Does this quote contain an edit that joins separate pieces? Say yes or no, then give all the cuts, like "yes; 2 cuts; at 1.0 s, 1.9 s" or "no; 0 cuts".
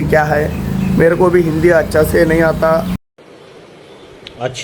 no; 0 cuts